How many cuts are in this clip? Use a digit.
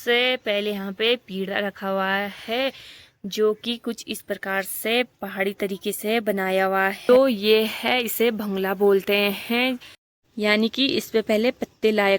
2